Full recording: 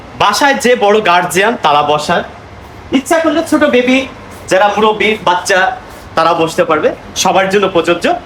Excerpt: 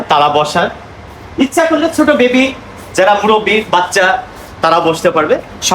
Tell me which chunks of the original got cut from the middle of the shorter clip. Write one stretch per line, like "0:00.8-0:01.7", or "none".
none